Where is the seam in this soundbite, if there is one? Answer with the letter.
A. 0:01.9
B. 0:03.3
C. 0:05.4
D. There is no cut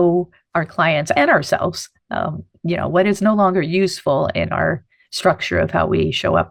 D